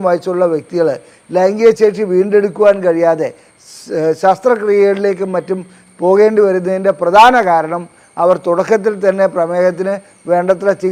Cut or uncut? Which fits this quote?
uncut